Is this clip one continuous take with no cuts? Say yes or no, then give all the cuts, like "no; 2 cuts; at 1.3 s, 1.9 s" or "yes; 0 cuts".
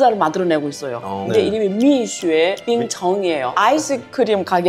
no; 2 cuts; at 1.4 s, 3.5 s